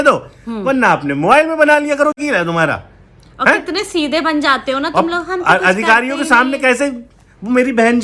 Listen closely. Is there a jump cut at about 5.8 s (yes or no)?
no